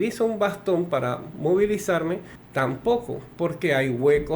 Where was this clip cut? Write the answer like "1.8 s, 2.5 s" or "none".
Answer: 2.4 s